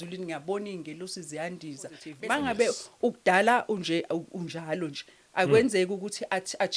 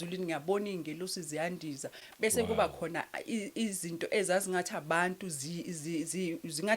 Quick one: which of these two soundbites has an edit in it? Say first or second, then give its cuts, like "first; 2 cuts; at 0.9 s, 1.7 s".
first; 1 cut; at 2.1 s